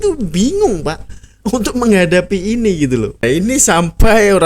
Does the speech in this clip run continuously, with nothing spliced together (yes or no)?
no